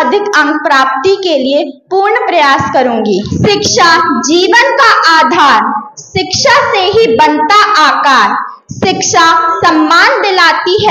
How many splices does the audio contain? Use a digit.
1